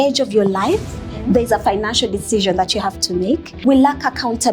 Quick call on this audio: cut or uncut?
cut